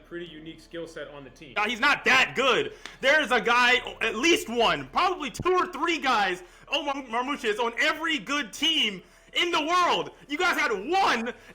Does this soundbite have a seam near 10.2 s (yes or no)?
no